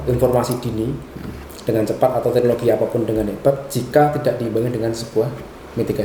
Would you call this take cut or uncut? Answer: uncut